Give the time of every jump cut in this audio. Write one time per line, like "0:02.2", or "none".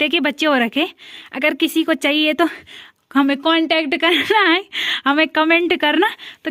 none